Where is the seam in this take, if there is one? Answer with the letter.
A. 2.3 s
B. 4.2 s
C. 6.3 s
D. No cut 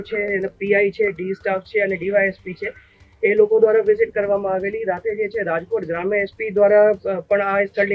D